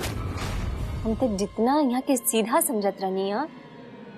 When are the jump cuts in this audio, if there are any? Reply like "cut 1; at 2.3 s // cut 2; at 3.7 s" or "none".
none